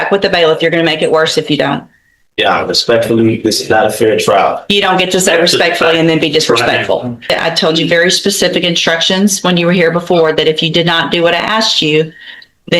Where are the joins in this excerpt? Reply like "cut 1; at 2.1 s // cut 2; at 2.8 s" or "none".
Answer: cut 1; at 7.3 s